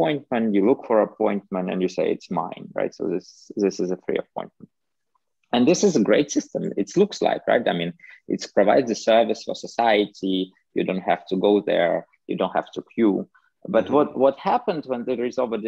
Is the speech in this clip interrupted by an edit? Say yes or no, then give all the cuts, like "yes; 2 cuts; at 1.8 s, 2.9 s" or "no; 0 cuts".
no; 0 cuts